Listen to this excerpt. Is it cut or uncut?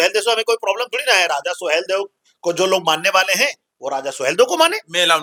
uncut